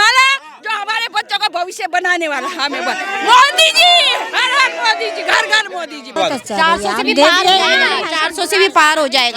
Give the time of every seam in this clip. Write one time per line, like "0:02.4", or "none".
0:06.2